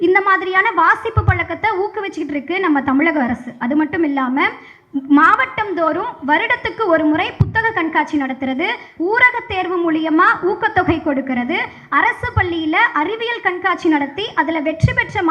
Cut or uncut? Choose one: uncut